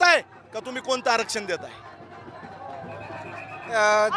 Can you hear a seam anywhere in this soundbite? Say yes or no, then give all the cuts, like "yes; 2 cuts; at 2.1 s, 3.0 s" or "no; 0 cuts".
no; 0 cuts